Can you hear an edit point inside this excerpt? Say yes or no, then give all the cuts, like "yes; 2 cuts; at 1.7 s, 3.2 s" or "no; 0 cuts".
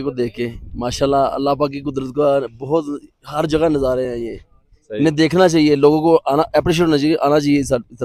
no; 0 cuts